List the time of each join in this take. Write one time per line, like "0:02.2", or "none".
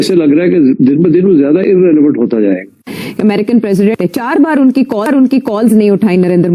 0:03.0
0:03.9